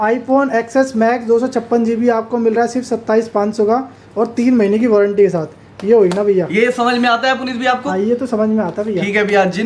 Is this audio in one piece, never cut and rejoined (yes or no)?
yes